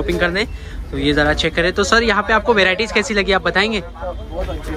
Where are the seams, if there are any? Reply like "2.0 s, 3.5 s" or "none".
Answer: none

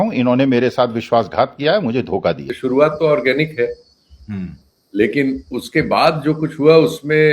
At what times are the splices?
2.5 s

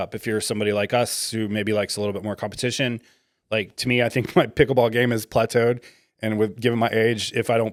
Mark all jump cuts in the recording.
none

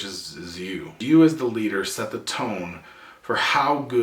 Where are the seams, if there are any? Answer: 1.0 s

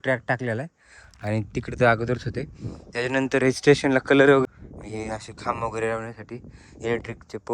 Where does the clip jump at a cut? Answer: 4.4 s

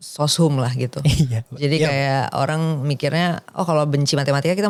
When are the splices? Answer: none

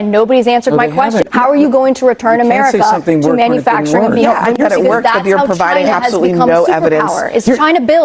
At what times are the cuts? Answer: 1.3 s, 4.6 s

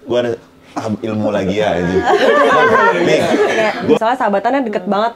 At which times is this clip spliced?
4.0 s

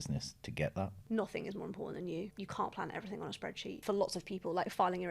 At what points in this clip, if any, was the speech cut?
1.0 s, 3.7 s

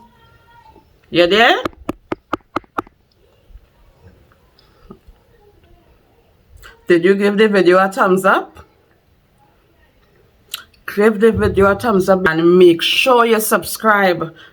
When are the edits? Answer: 12.2 s

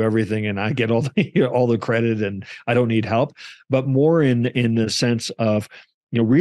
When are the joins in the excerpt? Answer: none

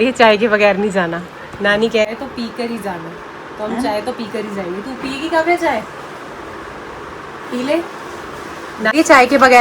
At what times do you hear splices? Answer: none

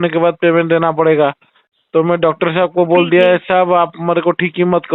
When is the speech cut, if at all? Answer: none

